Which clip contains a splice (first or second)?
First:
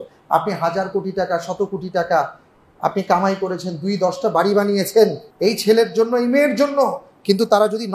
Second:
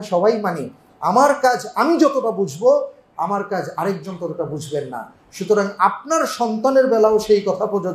first